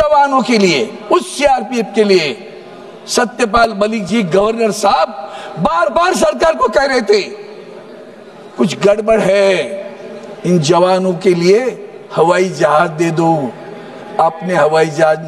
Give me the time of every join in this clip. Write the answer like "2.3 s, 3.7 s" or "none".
none

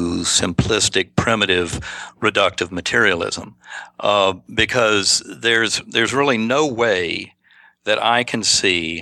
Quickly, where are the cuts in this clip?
none

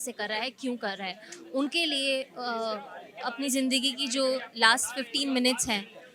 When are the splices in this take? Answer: none

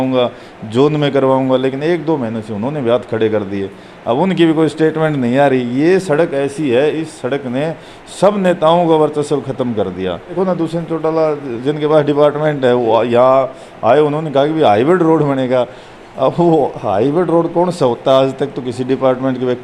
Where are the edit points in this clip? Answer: 10.4 s

